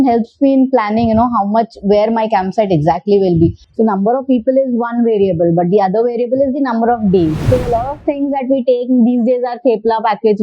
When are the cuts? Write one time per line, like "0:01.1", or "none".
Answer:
0:03.6
0:07.4